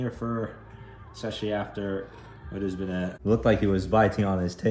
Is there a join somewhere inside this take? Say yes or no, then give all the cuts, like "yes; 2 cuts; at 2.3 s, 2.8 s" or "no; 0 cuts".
yes; 1 cut; at 3.1 s